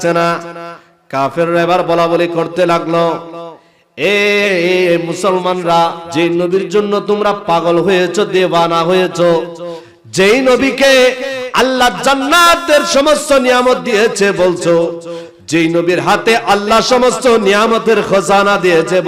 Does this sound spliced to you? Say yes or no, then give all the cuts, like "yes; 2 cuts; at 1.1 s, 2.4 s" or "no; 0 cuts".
yes; 1 cut; at 6.0 s